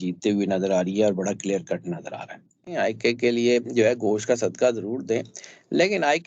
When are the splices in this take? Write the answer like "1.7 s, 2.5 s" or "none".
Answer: 3.0 s